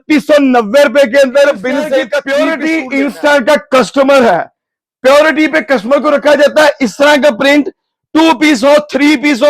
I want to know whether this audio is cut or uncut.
cut